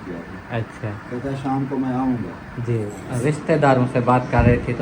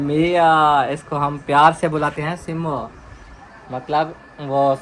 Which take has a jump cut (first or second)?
first